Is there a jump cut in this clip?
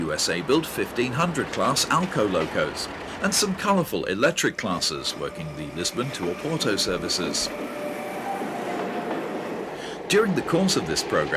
yes; 1 cut; at 9.5 s

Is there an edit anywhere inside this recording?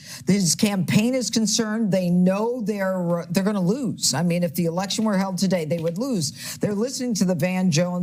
no; 0 cuts

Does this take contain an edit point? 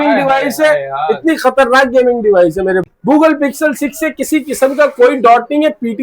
yes; 1 cut; at 2.8 s

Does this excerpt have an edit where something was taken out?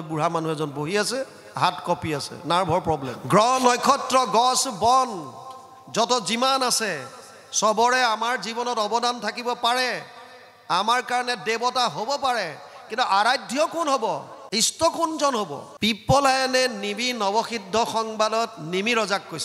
yes; 3 cuts; at 3.1 s, 14.3 s, 15.6 s

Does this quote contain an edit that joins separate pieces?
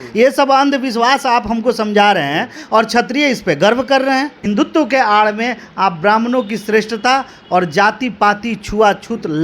yes; 1 cut; at 4.4 s

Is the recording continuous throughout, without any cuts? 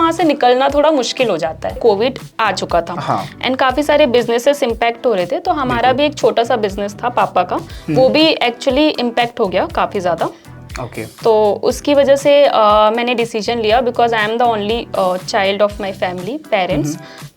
no; 1 cut; at 1.8 s

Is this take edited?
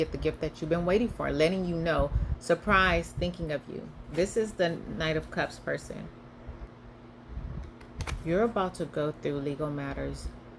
yes; 1 cut; at 6.7 s

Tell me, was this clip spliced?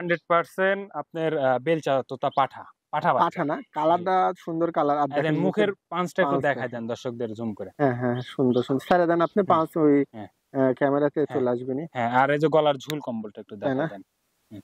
no; 0 cuts

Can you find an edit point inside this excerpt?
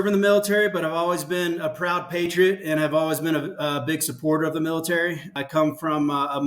yes; 1 cut; at 5.3 s

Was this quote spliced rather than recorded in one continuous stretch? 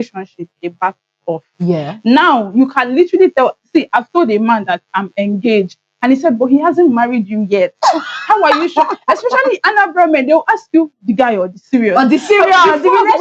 no; 0 cuts

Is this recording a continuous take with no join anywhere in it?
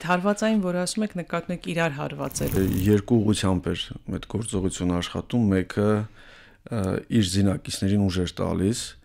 no; 1 cut; at 2.6 s

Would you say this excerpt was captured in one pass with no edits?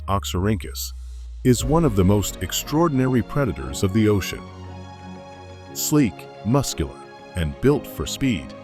no; 2 cuts; at 4.3 s, 5.9 s

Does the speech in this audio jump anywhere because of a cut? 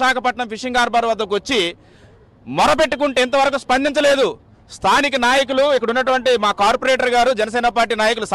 yes; 1 cut; at 5.9 s

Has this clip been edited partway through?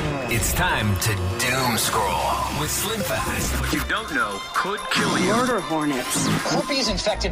no; 0 cuts

